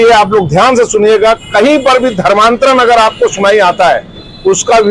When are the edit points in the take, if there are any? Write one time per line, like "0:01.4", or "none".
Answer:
none